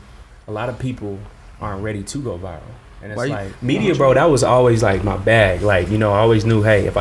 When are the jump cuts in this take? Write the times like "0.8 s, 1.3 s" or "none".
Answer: 3.6 s